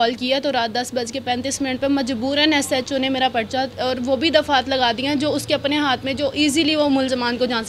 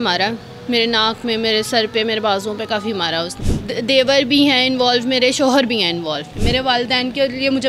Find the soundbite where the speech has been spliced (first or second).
second